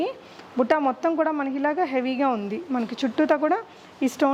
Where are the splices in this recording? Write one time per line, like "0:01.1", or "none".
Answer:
none